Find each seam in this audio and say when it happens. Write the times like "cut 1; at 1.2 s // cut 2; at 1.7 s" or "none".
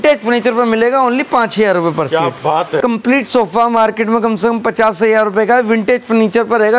cut 1; at 2.8 s

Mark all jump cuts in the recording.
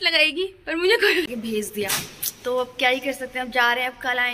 cut 1; at 1.2 s

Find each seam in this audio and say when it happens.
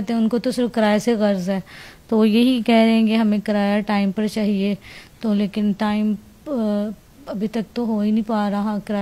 none

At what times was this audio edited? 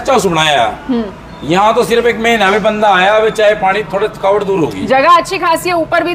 none

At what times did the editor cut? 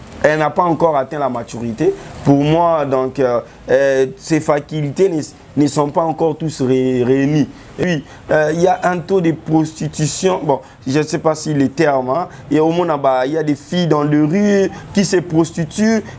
cut 1; at 7.8 s

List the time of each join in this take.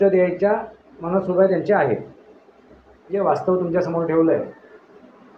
cut 1; at 3.1 s

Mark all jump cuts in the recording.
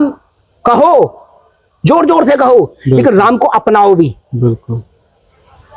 none

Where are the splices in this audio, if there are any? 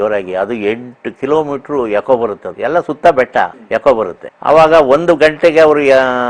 cut 1; at 2.5 s // cut 2; at 3.6 s // cut 3; at 4.3 s

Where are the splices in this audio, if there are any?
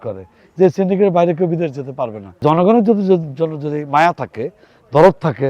cut 1; at 2.4 s

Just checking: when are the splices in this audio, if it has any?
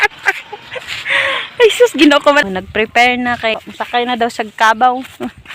cut 1; at 2.4 s // cut 2; at 4.1 s

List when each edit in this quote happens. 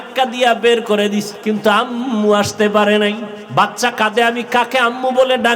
cut 1; at 1.3 s // cut 2; at 3.3 s

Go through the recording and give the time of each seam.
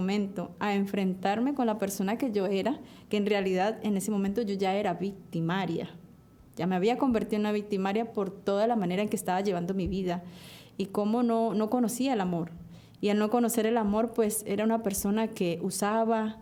none

